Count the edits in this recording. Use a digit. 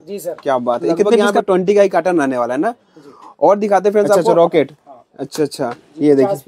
2